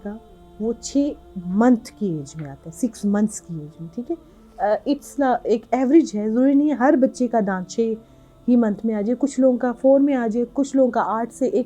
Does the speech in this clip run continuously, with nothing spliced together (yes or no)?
yes